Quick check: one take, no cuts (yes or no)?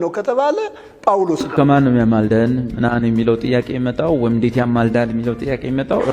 no